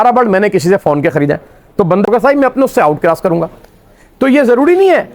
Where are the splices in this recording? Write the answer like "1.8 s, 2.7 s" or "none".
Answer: 2.1 s